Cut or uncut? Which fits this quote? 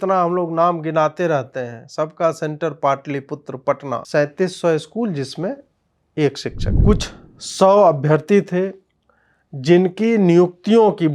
cut